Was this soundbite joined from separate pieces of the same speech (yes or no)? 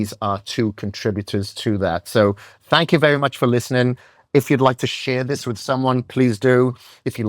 no